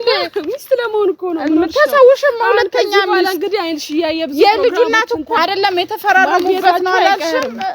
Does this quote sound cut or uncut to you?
cut